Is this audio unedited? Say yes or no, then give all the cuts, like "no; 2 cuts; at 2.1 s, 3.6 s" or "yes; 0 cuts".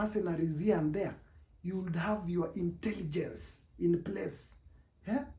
yes; 0 cuts